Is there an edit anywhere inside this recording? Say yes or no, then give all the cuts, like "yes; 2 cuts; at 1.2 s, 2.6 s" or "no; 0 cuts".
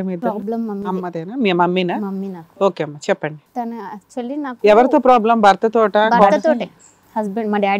yes; 1 cut; at 6.4 s